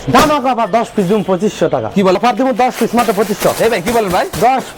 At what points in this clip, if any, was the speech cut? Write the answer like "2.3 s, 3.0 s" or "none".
2.2 s